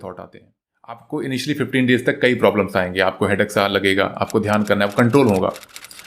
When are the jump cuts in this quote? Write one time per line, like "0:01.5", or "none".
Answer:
0:01.0